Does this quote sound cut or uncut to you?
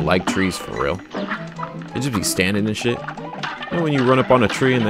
uncut